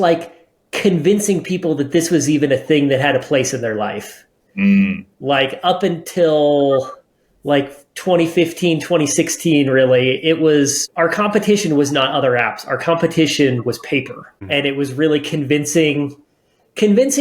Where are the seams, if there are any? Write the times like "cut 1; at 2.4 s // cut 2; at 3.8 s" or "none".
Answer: cut 1; at 10.8 s // cut 2; at 14.4 s